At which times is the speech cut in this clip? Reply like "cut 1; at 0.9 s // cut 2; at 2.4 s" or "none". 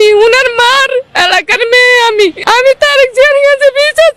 cut 1; at 2.4 s